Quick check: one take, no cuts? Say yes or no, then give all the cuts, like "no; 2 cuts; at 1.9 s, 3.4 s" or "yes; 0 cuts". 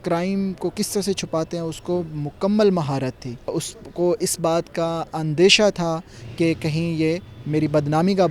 no; 1 cut; at 3.7 s